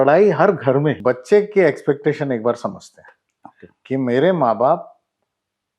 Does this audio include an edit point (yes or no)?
yes